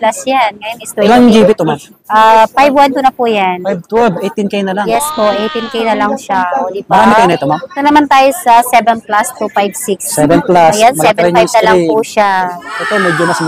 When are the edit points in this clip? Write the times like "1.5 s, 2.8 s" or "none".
7.7 s